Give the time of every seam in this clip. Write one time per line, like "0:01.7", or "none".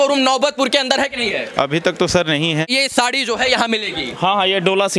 0:02.7